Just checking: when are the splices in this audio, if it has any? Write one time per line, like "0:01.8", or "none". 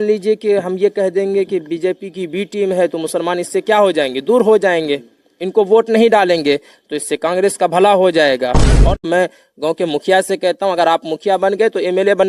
0:09.0